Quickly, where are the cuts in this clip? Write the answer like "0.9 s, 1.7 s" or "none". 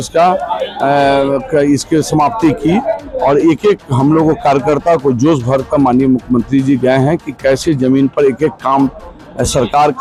none